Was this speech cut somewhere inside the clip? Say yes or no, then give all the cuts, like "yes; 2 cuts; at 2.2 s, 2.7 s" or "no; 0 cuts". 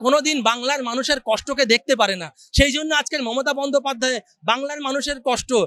no; 0 cuts